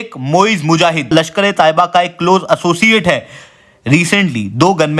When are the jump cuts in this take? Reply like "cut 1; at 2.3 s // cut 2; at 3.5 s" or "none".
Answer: cut 1; at 1.1 s